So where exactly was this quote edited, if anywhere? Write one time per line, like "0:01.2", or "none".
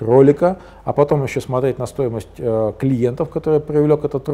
none